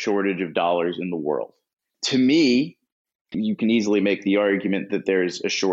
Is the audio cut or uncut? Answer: cut